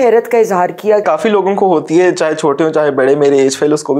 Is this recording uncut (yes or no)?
no